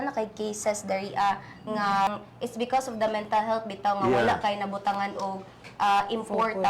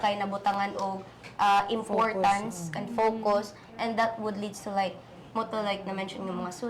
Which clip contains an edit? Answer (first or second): first